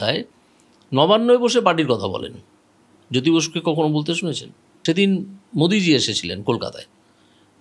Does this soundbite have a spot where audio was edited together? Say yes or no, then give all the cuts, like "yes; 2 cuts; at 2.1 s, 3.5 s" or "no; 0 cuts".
yes; 1 cut; at 4.7 s